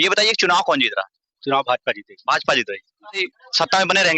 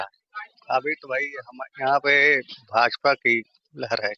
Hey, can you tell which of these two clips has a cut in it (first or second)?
first